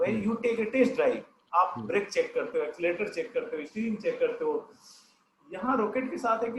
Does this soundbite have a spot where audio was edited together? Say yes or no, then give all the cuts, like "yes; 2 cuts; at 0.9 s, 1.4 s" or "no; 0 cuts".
no; 0 cuts